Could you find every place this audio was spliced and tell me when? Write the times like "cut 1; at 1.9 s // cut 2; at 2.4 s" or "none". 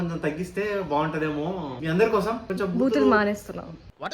cut 1; at 1.7 s // cut 2; at 2.5 s